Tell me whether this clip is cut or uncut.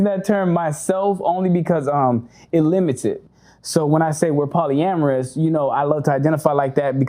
cut